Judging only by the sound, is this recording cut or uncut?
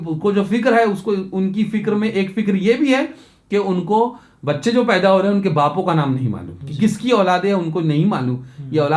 uncut